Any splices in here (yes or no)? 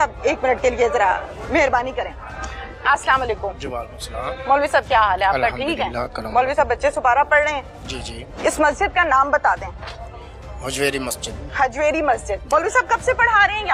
no